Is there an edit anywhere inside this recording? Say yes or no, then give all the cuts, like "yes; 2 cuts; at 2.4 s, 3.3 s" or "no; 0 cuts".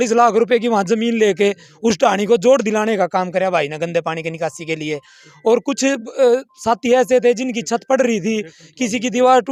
no; 0 cuts